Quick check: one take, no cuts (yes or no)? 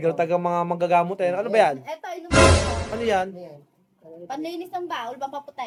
yes